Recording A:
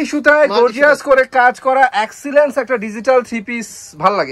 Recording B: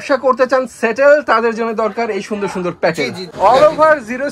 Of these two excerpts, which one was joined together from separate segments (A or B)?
B